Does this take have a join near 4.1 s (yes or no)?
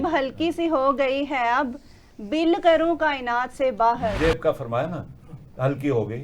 yes